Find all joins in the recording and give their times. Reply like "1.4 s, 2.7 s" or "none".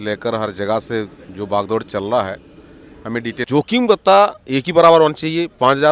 3.4 s